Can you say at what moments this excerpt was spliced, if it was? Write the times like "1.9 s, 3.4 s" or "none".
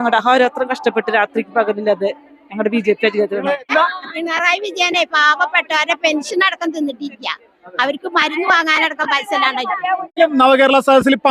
3.7 s, 10.2 s